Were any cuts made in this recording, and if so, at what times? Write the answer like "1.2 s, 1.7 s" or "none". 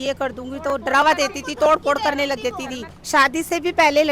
2.9 s